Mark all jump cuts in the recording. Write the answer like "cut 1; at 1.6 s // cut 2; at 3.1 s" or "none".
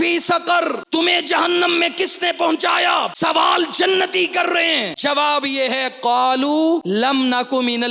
cut 1; at 0.8 s // cut 2; at 3.1 s // cut 3; at 4.9 s // cut 4; at 6.8 s